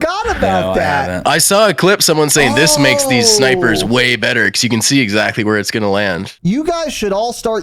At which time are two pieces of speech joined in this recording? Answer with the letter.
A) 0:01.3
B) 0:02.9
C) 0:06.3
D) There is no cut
C